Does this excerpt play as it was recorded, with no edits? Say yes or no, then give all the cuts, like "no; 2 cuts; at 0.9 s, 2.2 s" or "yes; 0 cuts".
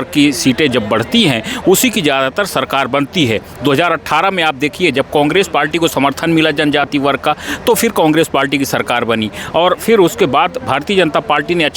yes; 0 cuts